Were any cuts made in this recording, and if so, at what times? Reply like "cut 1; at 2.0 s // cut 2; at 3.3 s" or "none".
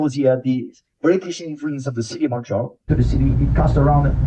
cut 1; at 2.9 s